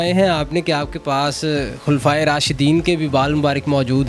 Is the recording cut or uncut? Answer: uncut